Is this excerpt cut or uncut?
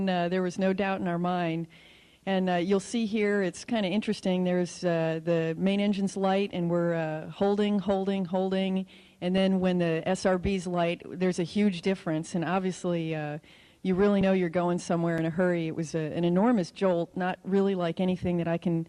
cut